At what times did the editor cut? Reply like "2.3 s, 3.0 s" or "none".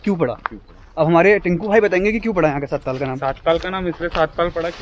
none